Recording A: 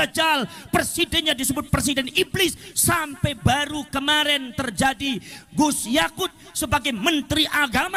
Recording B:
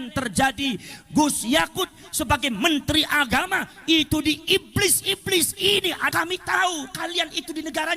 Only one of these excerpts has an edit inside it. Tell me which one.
B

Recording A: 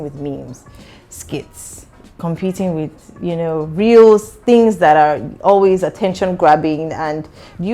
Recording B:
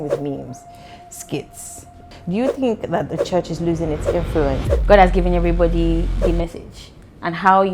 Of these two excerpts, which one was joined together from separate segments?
B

